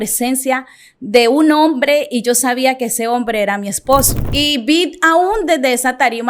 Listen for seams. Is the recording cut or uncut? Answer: cut